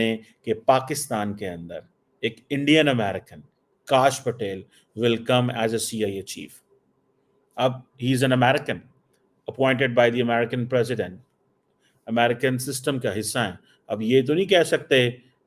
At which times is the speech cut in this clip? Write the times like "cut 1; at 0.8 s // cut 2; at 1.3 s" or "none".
none